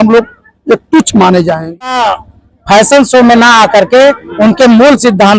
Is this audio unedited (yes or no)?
no